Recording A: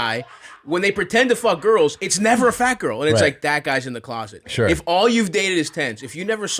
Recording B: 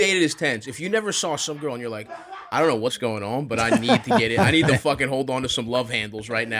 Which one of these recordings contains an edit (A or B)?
B